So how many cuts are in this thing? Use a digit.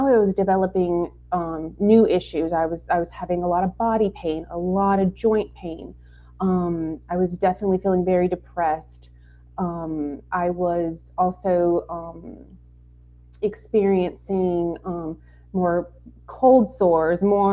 0